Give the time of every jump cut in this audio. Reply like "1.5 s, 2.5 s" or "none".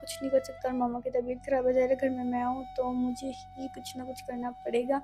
none